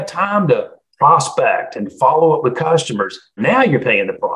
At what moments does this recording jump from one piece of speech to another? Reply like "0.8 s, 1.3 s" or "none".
3.3 s

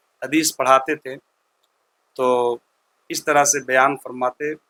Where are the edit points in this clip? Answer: none

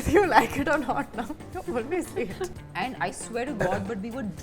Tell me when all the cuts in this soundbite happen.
2.5 s

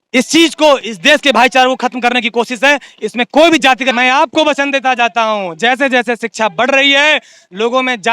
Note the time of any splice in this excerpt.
3.9 s

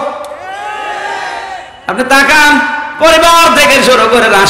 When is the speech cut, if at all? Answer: 1.7 s

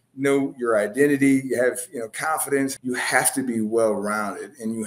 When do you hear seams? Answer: 2.7 s

